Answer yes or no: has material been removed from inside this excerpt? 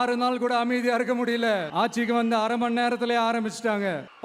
yes